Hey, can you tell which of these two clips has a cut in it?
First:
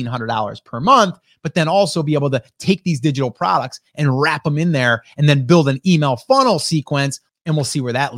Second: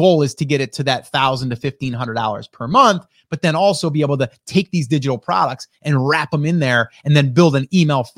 first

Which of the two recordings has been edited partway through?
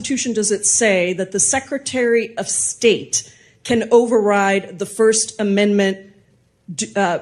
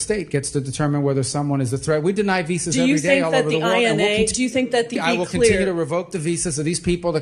second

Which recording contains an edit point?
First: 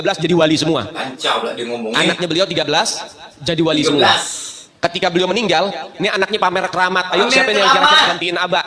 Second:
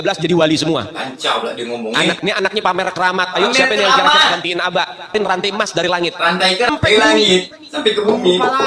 second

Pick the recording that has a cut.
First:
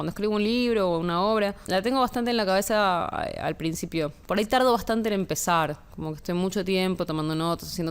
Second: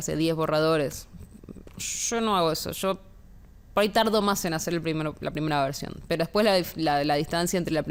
first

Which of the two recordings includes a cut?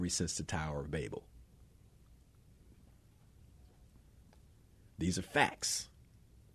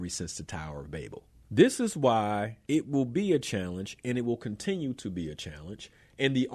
second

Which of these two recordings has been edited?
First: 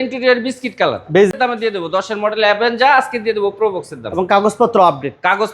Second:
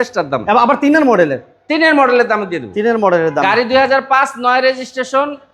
first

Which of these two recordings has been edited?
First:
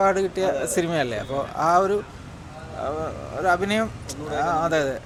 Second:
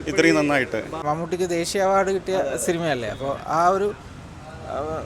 second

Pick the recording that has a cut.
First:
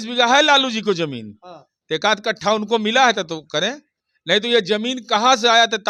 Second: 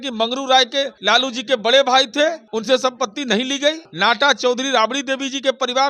second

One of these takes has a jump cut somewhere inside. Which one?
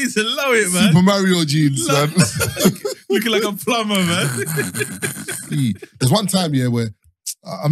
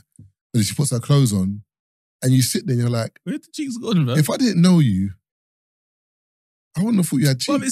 first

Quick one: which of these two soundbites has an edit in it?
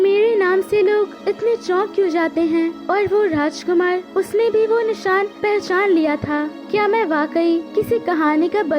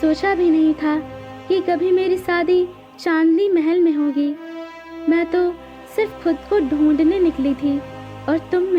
first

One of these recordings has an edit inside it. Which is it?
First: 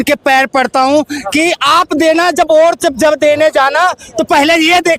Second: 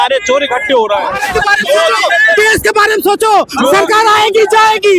second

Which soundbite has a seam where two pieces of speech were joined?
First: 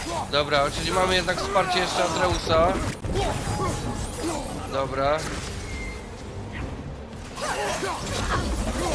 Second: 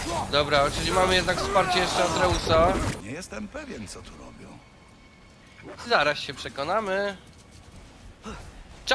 second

